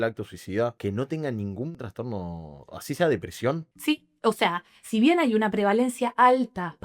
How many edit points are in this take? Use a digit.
3